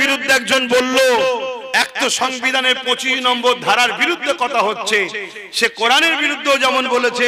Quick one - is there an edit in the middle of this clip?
no; 0 cuts

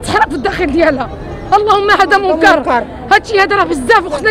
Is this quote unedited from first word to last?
yes; 0 cuts

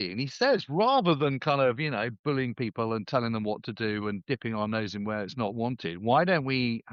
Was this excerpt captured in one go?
yes; 0 cuts

